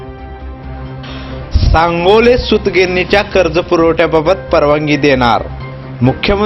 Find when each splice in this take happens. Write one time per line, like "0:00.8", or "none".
0:00.9